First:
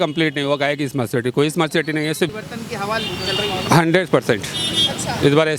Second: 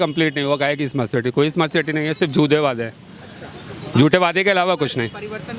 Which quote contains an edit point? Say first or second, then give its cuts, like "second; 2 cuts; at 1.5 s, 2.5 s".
first; 1 cut; at 2.3 s